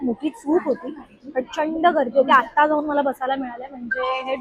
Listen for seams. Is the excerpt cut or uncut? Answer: uncut